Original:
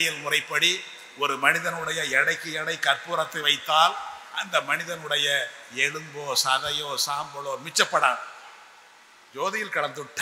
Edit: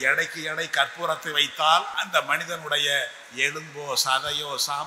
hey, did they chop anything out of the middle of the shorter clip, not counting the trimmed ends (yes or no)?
yes